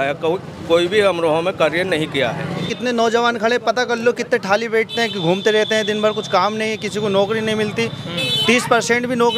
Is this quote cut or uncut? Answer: cut